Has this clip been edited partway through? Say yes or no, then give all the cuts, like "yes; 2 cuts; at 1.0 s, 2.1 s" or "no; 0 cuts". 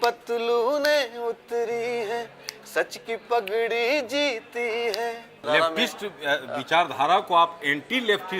yes; 1 cut; at 5.4 s